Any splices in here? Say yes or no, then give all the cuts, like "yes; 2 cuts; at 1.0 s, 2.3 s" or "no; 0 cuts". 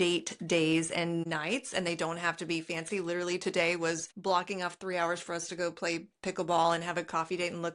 yes; 2 cuts; at 1.3 s, 4.1 s